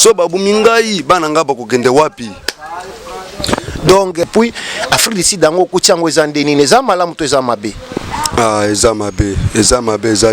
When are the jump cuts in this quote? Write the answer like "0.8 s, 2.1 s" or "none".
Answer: 4.2 s